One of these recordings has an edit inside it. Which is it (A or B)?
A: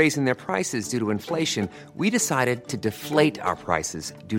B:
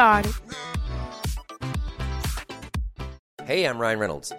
B